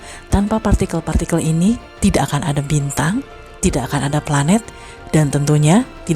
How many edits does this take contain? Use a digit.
0